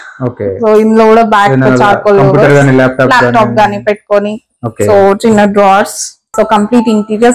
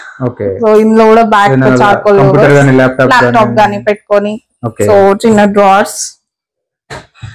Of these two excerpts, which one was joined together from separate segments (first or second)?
first